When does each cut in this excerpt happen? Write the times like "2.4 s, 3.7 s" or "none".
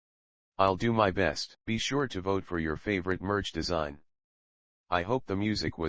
1.5 s